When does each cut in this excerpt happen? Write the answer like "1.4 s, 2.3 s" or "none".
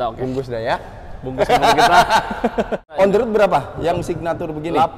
2.9 s